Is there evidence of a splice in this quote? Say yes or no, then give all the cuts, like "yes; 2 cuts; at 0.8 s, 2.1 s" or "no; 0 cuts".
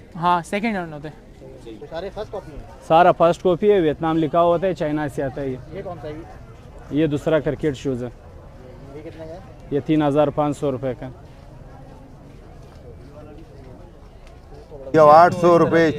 yes; 2 cuts; at 1.8 s, 14.9 s